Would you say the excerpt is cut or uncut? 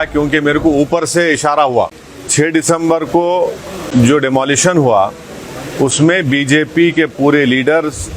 cut